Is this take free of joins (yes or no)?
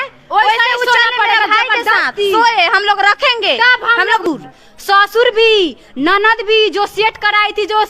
no